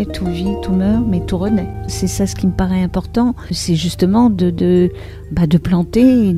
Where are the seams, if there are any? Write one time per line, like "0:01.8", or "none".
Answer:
0:01.9
0:03.6